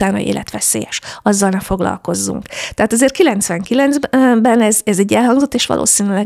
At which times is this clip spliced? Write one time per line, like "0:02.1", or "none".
none